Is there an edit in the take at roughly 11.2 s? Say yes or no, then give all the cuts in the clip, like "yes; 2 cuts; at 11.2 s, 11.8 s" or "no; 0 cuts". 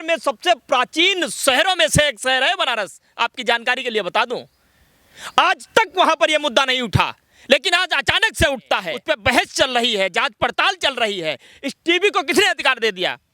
no; 1 cut; at 8.9 s